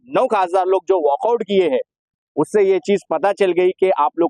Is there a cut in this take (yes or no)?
no